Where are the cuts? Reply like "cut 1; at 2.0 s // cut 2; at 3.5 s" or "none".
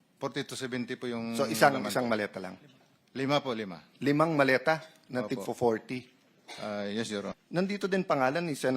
cut 1; at 7.3 s